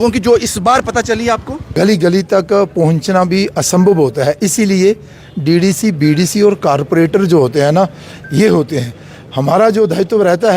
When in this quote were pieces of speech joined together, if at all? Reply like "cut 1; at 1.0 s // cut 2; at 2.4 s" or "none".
cut 1; at 1.7 s